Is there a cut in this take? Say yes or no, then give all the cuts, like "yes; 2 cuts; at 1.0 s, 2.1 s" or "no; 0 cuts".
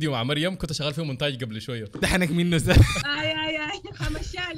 yes; 2 cuts; at 2.0 s, 3.1 s